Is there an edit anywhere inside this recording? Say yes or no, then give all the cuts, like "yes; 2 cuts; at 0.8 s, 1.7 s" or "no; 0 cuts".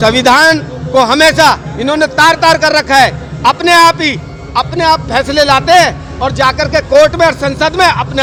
no; 0 cuts